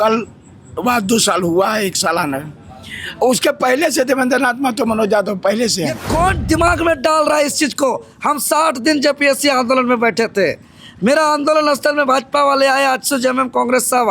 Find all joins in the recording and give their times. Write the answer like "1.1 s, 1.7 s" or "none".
6.0 s